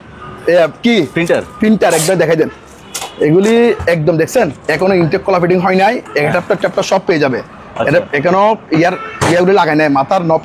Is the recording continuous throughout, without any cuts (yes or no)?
yes